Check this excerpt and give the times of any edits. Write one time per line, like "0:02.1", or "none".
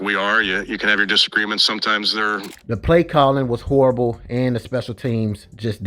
0:02.5